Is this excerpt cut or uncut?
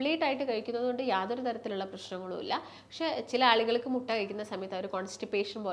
uncut